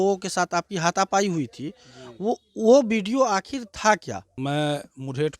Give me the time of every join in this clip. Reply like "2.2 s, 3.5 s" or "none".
4.3 s